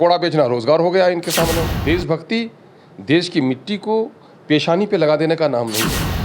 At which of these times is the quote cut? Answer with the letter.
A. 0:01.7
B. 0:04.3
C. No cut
A